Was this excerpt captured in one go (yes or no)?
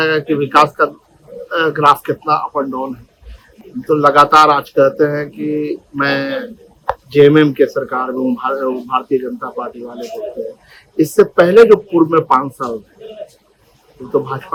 yes